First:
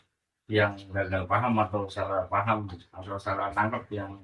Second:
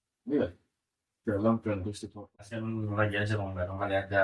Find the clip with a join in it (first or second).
second